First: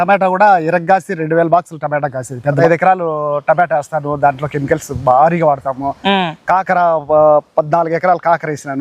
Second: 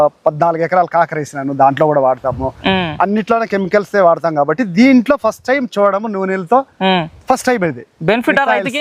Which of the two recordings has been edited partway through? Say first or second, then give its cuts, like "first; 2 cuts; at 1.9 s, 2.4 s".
first; 1 cut; at 2.5 s